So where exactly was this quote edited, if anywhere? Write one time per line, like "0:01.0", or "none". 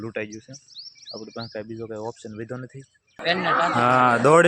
0:03.1